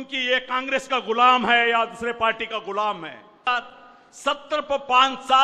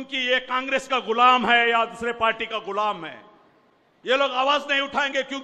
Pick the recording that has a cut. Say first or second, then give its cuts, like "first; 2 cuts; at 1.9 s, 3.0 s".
first; 1 cut; at 3.5 s